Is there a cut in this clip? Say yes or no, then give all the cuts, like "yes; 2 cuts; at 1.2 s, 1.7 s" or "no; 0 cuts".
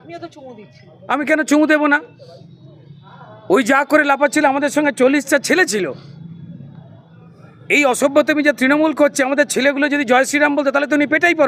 no; 0 cuts